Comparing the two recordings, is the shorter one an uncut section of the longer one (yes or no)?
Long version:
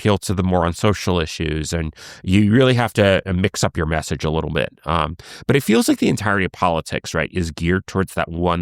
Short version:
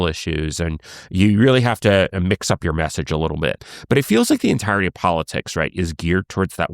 no